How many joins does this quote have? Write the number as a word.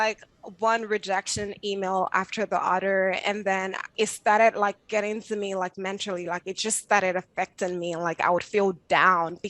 one